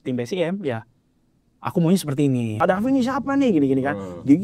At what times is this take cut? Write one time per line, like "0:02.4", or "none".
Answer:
0:02.6